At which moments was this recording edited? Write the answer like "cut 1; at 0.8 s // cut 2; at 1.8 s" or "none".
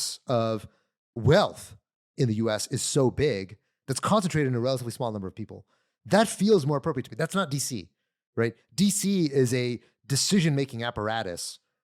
cut 1; at 1.2 s